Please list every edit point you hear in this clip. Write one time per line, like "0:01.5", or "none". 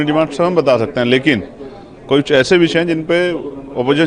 none